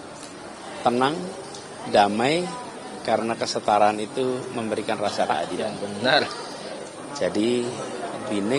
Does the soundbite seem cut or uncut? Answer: uncut